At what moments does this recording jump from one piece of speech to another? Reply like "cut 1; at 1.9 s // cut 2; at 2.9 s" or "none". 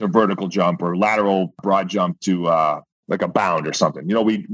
cut 1; at 1.6 s // cut 2; at 3.0 s